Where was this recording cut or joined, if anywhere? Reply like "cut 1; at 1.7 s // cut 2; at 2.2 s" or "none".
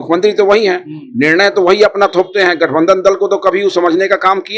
none